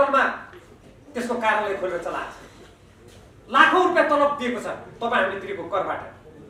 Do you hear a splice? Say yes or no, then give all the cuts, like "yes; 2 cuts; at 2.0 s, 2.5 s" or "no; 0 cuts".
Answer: no; 0 cuts